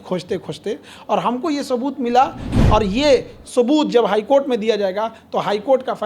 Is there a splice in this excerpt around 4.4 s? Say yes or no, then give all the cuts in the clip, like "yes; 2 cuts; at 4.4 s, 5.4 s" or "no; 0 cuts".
no; 1 cut; at 2.5 s